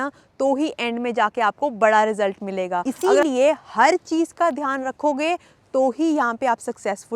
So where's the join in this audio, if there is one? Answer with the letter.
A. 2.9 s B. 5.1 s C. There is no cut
A